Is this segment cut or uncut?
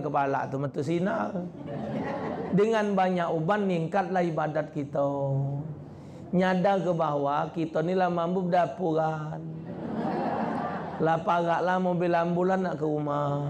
uncut